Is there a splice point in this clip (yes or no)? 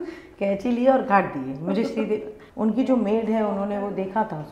yes